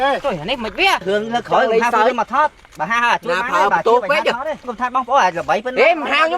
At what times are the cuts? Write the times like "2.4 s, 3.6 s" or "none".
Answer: 1.0 s, 4.6 s